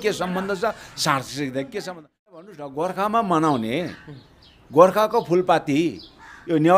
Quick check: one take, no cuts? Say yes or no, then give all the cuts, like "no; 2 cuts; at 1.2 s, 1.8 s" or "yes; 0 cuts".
no; 1 cut; at 2.4 s